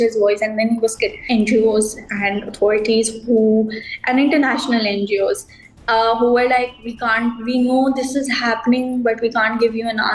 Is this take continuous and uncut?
no; 1 cut; at 1.2 s

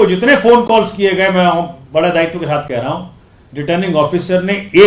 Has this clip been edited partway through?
no; 0 cuts

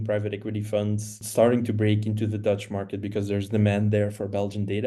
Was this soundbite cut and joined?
yes; 1 cut; at 1.2 s

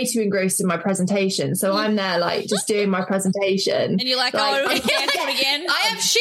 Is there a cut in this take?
no; 0 cuts

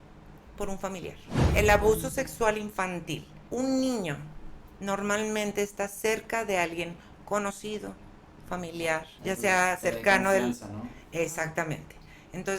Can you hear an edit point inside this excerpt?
yes; 3 cuts; at 1.4 s, 3.3 s, 9.1 s

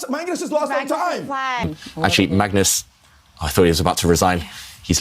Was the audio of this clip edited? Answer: yes; 1 cut; at 1.6 s

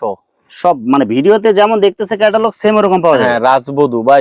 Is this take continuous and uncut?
yes; 0 cuts

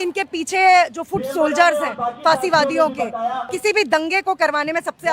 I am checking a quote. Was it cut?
yes; 1 cut; at 3.5 s

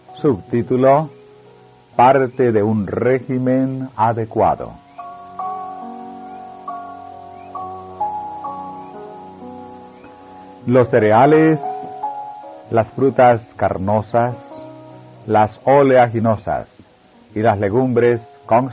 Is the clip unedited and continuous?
no; 1 cut; at 8.9 s

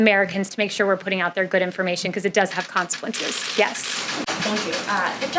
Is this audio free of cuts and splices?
yes; 0 cuts

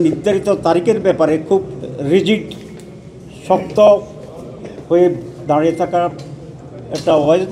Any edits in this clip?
no; 0 cuts

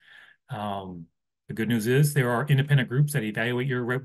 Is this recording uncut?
no; 1 cut; at 1.0 s

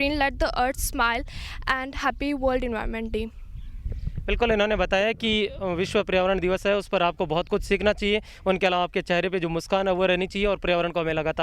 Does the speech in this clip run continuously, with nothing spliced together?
yes; 0 cuts

